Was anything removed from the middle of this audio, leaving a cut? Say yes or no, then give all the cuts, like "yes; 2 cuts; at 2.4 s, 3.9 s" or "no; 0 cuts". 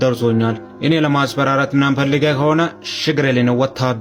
no; 0 cuts